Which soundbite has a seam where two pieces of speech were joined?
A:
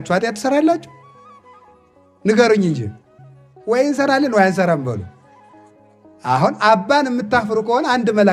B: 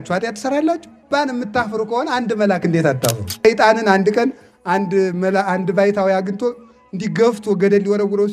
B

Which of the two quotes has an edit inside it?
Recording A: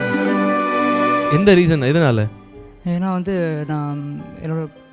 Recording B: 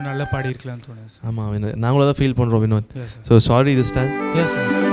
A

